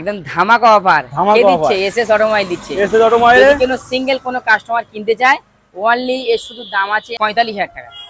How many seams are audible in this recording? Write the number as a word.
zero